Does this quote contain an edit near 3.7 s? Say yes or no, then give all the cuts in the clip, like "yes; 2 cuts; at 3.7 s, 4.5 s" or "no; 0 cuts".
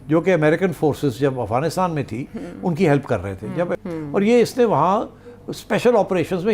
yes; 1 cut; at 3.7 s